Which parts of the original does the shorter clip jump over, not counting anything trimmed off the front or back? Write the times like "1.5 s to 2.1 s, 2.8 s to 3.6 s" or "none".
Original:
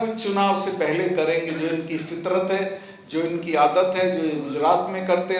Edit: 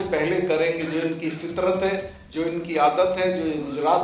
2.8 s to 2.9 s